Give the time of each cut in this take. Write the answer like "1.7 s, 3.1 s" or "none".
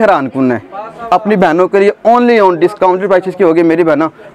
none